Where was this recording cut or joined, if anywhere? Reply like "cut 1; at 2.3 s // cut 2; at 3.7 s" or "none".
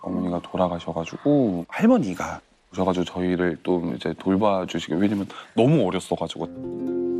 cut 1; at 1.7 s